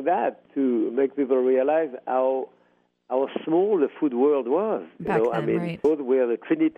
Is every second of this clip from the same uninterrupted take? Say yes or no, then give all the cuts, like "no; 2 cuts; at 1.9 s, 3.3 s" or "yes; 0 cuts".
yes; 0 cuts